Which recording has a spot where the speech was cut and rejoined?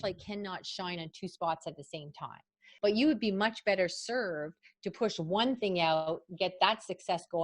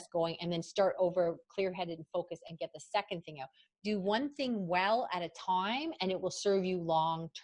first; 1 cut; at 2.6 s

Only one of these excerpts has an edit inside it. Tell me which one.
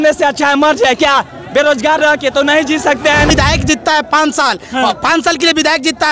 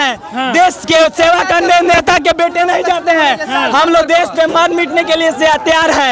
first; 1 cut; at 3.3 s

